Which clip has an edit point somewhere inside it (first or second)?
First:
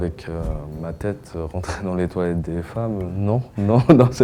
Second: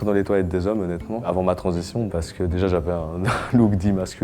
second